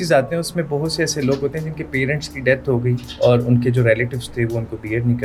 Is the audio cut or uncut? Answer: uncut